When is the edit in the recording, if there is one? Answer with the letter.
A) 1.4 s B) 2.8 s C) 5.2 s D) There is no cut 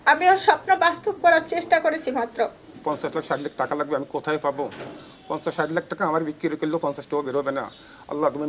B